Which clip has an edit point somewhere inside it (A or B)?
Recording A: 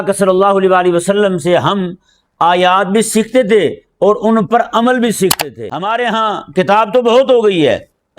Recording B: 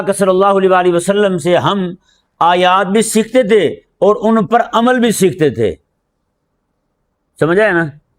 A